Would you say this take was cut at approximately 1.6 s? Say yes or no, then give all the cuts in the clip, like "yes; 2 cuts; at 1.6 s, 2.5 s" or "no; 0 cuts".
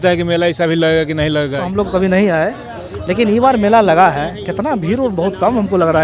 yes; 1 cut; at 1.6 s